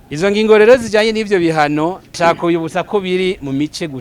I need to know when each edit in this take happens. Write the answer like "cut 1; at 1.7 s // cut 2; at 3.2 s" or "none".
cut 1; at 2.1 s